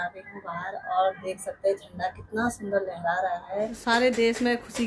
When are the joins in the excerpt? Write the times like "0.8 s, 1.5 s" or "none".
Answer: 3.8 s